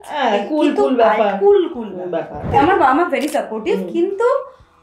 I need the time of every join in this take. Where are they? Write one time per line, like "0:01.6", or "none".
0:02.5